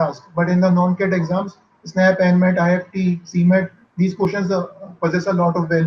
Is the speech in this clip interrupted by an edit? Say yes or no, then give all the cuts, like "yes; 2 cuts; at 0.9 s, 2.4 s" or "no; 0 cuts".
no; 0 cuts